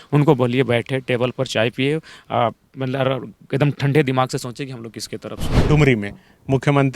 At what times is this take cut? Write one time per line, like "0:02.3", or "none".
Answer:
0:05.6

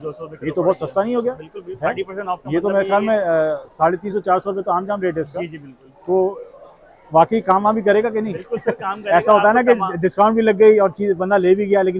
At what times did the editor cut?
none

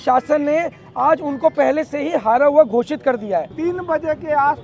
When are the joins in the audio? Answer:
0:03.5

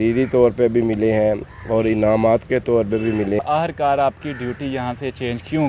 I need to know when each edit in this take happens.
0:03.4

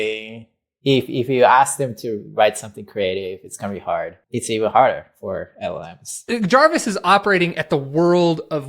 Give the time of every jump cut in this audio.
0:04.2
0:06.2

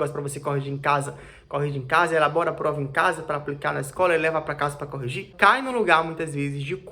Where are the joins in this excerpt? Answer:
0:05.3

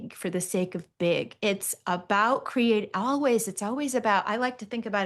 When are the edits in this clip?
none

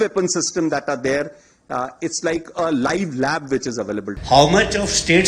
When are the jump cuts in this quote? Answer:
0:04.1

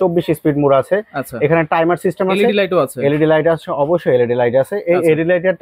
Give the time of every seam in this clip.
none

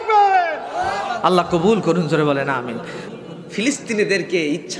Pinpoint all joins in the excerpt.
0:03.0

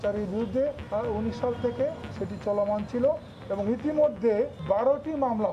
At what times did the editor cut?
0:00.8
0:02.2
0:04.6

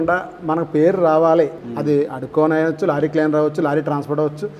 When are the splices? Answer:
0:01.6

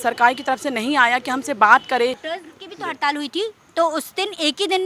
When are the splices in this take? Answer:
0:02.3

